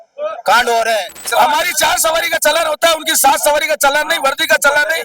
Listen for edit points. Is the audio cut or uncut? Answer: cut